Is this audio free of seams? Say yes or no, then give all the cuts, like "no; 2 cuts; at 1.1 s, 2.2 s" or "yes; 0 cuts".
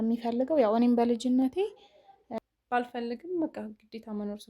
no; 1 cut; at 2.4 s